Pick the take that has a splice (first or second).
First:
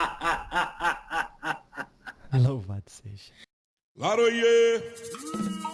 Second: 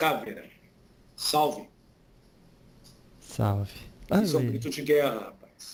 first